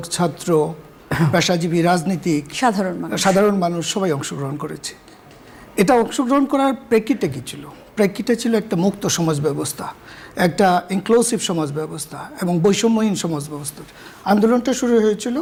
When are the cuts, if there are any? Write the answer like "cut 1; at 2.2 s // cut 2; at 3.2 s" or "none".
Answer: none